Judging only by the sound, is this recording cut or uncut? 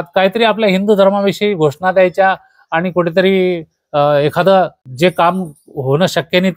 cut